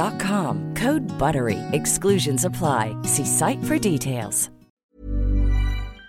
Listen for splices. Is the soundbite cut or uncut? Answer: cut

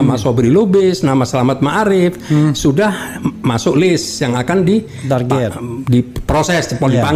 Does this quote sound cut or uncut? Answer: uncut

